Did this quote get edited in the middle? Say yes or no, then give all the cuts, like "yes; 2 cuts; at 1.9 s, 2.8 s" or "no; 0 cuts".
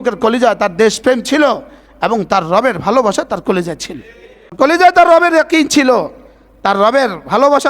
yes; 1 cut; at 4.6 s